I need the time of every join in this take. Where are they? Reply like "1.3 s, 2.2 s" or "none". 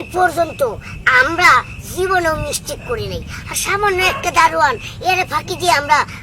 none